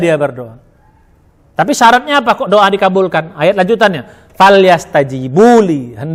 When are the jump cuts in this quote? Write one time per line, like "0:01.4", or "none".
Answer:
none